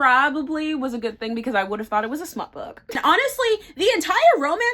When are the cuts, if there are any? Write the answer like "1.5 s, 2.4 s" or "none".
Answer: 3.0 s